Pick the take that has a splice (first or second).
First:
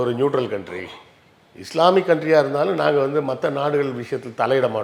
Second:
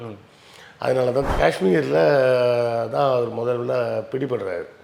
second